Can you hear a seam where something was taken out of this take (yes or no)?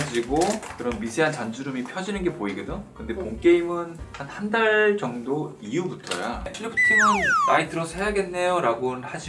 yes